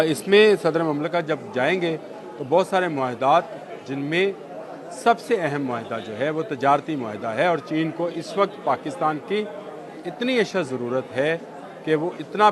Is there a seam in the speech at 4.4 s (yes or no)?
no